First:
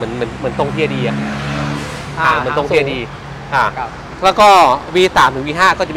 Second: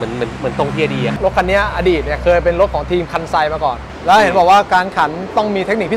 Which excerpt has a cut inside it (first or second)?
second